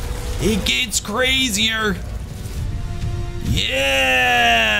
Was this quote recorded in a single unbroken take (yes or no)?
no